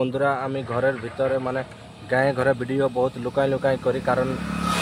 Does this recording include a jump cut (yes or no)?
no